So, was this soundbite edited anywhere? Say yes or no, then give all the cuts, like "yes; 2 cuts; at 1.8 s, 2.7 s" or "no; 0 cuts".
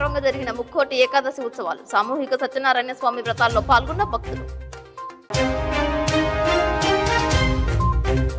no; 0 cuts